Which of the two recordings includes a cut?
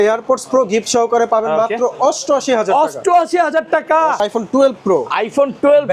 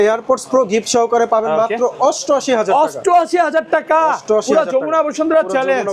first; 1 cut; at 4.2 s

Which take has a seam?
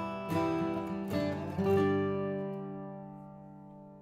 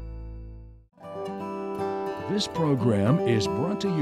second; 2 cuts; at 1.1 s, 2.3 s

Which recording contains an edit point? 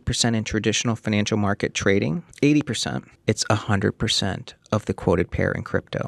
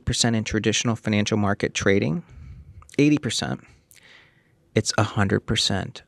first; 2 cuts; at 2.2 s, 3.1 s

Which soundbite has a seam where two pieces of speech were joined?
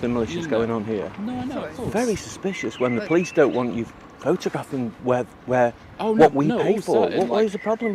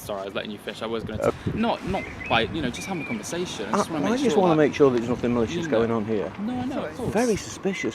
second; 1 cut; at 1.3 s

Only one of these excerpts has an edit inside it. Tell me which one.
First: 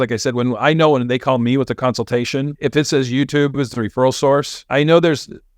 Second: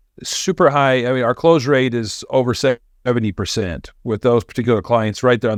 first; 2 cuts; at 2.5 s, 4.6 s

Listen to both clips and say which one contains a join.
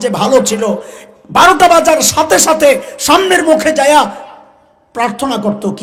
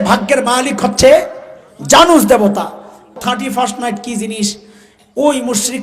second; 1 cut; at 3.1 s

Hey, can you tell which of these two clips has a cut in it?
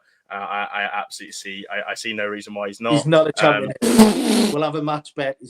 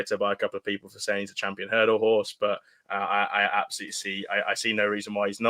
first; 1 cut; at 4.5 s

